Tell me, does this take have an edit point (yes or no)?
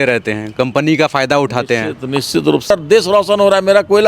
yes